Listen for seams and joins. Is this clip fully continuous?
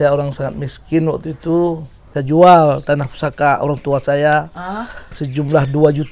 no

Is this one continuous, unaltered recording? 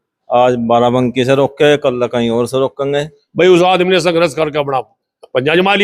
no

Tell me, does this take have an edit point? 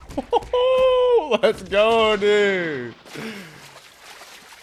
no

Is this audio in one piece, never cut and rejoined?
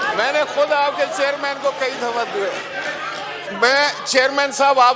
no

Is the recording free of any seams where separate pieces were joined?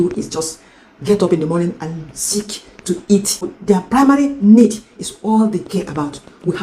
no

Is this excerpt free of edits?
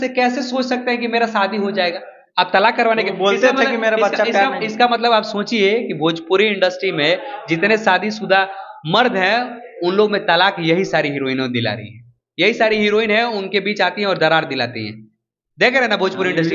yes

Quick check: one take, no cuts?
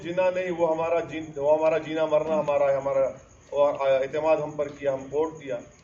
yes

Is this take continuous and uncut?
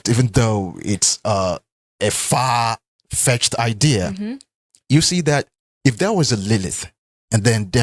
yes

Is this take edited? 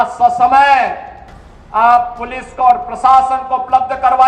no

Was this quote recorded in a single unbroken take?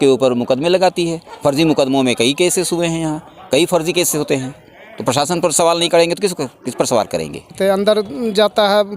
no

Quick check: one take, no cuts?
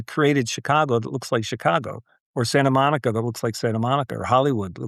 yes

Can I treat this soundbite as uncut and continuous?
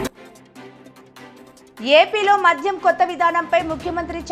no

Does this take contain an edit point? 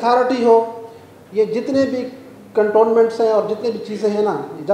no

